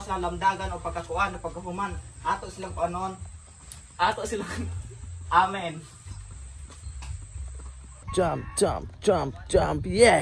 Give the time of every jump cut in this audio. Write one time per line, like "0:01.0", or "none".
0:08.0